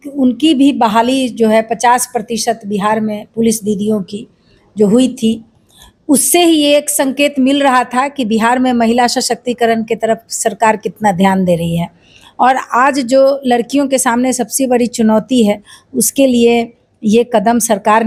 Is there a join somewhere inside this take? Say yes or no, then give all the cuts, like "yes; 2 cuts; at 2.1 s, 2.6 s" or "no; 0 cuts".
no; 0 cuts